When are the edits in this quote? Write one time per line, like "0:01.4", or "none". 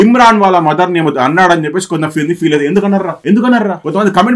none